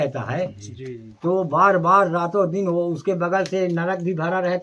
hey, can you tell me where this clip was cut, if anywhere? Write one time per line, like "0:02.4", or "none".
none